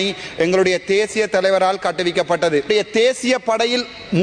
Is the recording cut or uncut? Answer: cut